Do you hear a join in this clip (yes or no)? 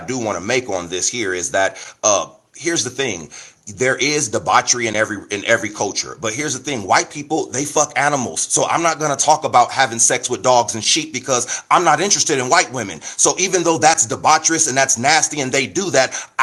no